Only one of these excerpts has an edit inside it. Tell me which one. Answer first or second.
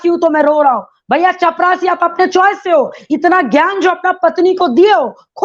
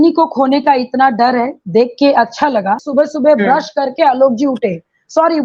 second